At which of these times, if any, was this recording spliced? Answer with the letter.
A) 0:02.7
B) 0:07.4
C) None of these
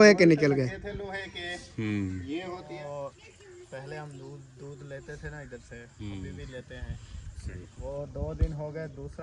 A